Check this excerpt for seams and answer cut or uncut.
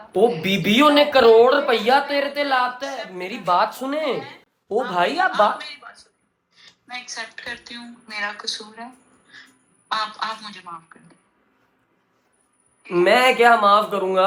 uncut